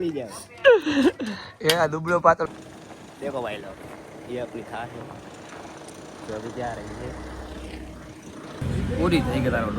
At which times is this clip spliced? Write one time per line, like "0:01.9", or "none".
0:02.5
0:08.6